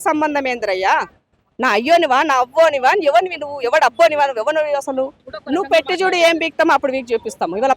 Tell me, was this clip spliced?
yes; 1 cut; at 5.2 s

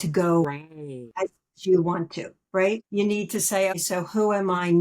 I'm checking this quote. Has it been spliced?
yes; 3 cuts; at 1.5 s, 2.8 s, 3.8 s

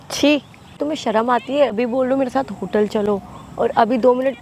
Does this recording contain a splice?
yes; 2 cuts; at 0.8 s, 1.8 s

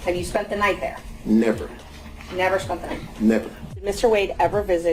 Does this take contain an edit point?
yes; 1 cut; at 3.8 s

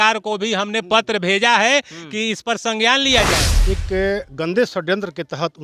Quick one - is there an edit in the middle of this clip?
yes; 1 cut; at 3.5 s

